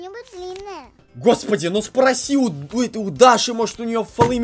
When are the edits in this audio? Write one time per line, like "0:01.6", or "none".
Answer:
0:01.0